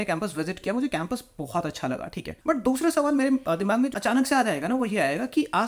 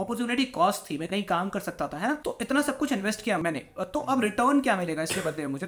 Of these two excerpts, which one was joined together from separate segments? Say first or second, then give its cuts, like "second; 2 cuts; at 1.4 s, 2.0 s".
first; 1 cut; at 3.9 s